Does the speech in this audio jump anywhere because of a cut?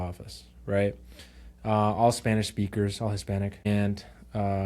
yes; 1 cut; at 3.7 s

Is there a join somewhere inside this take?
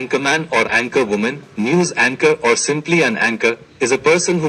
no; 0 cuts

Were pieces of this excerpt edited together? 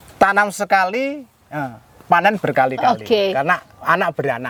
no; 0 cuts

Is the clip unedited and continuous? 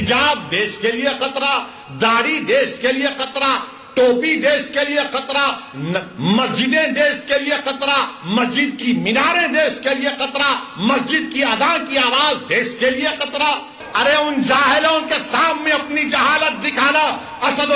no; 1 cut; at 13.8 s

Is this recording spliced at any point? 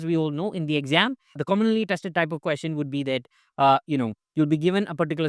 yes; 1 cut; at 1.4 s

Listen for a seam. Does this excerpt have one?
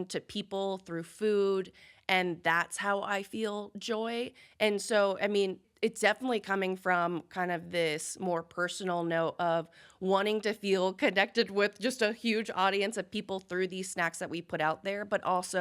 yes; 1 cut; at 5.7 s

